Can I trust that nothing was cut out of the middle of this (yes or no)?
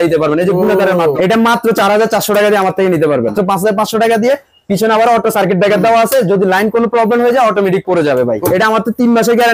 no